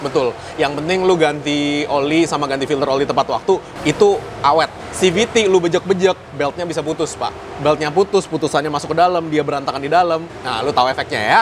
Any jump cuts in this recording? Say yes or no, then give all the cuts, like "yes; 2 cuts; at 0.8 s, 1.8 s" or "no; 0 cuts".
yes; 3 cuts; at 3.7 s, 4.8 s, 10.4 s